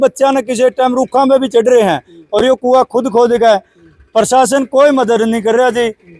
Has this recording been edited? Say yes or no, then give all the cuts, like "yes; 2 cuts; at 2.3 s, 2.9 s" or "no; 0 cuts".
no; 0 cuts